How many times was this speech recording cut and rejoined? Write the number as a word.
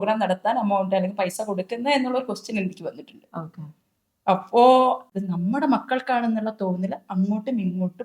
one